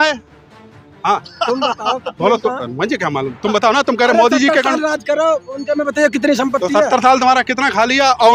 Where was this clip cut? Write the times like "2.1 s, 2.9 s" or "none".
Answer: none